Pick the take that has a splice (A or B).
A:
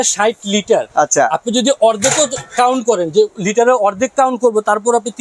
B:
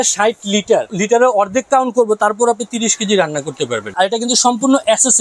B